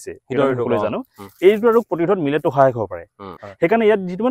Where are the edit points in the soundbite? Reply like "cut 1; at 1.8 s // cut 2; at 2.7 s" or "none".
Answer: cut 1; at 3.2 s